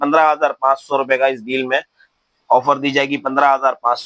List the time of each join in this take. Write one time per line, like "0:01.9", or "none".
none